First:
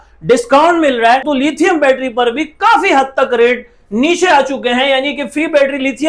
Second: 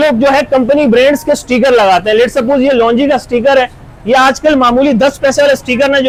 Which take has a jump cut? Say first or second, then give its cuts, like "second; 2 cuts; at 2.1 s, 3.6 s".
first; 1 cut; at 1.3 s